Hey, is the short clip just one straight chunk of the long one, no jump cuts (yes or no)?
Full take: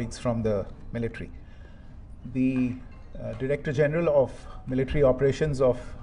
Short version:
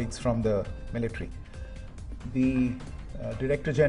yes